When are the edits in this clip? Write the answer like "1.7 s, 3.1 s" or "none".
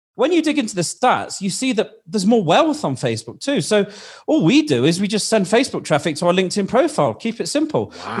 0.9 s